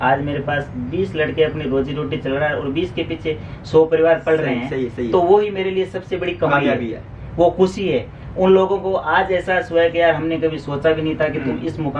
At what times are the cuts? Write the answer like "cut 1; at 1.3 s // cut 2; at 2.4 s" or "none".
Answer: none